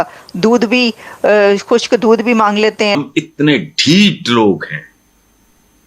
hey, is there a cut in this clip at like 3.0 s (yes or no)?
yes